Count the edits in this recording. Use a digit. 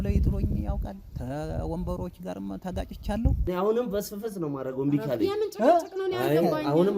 1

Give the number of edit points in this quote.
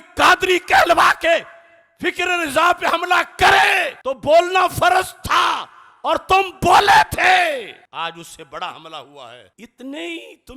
0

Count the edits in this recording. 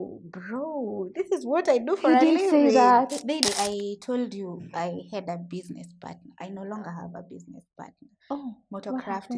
1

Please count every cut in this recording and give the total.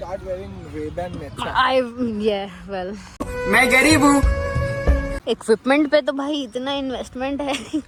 0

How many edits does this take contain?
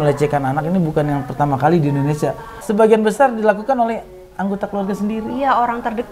1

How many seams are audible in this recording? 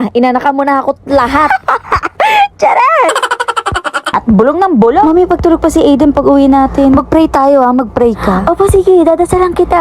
1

